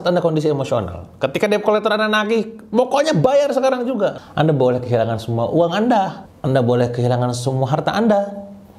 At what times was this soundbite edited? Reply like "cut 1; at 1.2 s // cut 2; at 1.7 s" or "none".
cut 1; at 4.2 s